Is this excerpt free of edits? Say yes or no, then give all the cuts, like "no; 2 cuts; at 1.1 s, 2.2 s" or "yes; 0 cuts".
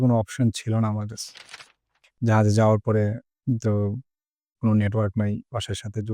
no; 2 cuts; at 1.4 s, 3.3 s